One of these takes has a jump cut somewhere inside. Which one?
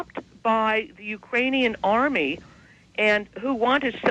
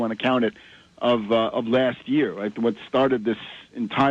first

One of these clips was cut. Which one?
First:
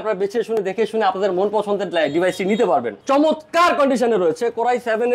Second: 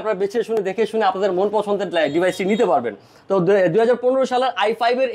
first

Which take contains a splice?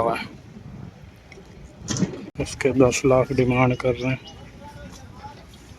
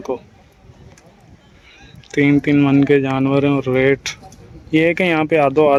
first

